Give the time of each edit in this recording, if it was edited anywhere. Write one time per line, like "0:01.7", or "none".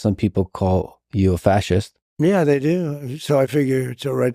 0:02.0